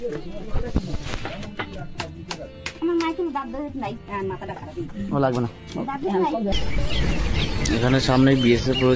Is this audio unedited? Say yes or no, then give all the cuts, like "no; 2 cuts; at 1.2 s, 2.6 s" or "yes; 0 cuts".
no; 1 cut; at 6.5 s